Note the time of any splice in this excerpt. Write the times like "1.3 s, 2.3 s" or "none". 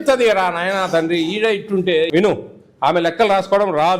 2.1 s